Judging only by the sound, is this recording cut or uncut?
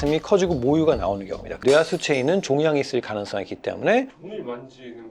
cut